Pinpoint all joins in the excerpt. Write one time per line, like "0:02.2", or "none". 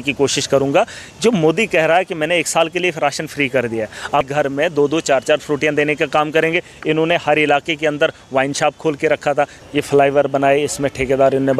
0:04.3
0:09.6